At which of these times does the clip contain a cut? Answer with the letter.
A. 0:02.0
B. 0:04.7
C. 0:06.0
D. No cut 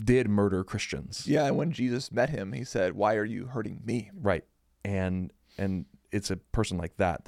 B